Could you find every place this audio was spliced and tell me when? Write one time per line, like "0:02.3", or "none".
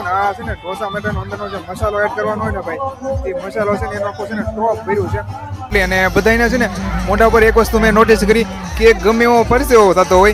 0:05.7